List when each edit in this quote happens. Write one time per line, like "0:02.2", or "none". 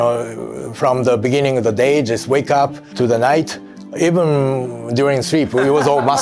0:02.8